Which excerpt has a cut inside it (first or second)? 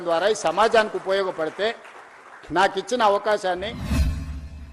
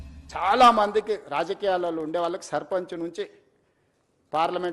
first